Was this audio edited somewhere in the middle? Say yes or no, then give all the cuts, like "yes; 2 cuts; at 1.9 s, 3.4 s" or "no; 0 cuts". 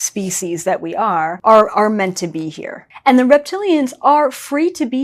yes; 2 cuts; at 1.4 s, 2.9 s